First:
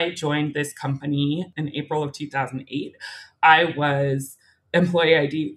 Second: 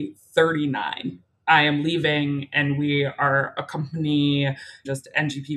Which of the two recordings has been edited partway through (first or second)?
second